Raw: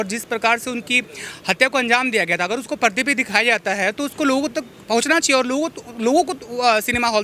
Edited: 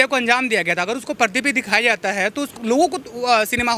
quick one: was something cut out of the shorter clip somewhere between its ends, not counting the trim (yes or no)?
yes